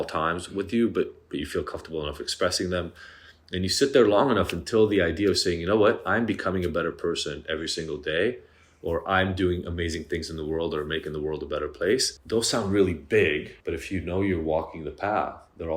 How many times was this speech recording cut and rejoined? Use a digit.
2